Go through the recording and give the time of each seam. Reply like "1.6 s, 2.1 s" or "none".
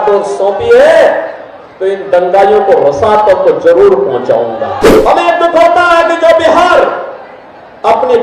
4.9 s